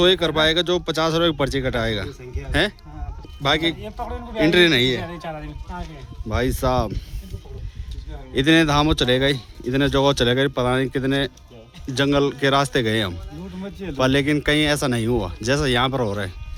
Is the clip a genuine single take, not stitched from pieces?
yes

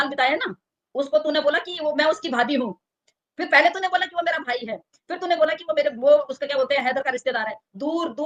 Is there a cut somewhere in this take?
no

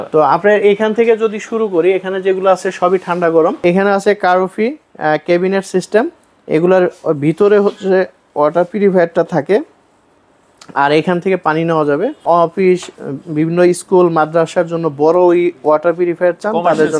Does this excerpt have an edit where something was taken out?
yes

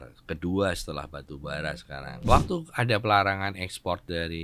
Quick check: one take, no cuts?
no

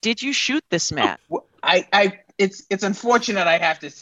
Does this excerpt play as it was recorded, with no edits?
no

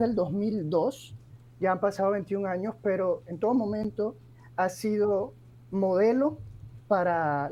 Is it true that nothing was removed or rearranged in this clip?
yes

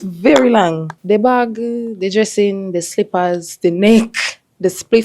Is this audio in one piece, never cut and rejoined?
no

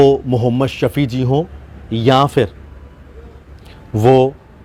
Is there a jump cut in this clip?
no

